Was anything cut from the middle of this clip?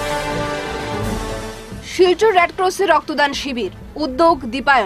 yes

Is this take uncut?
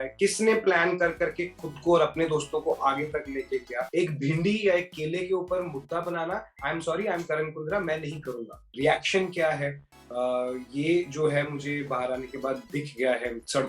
no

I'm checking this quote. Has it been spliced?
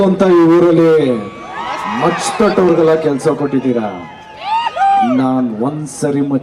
no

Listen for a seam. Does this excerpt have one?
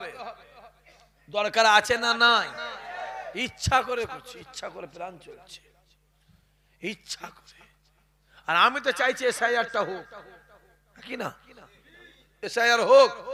no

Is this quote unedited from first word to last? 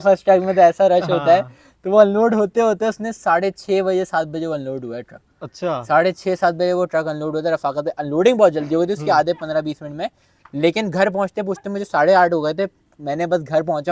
yes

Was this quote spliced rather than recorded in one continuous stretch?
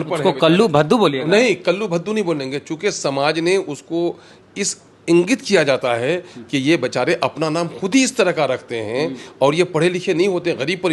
no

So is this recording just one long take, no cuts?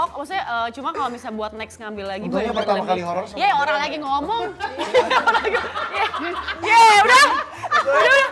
yes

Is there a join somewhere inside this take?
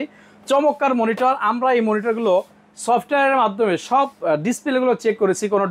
no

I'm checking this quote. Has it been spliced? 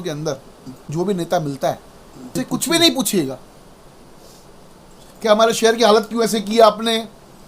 yes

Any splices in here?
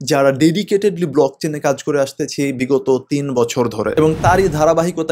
yes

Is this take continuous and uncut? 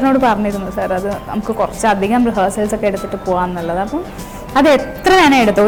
yes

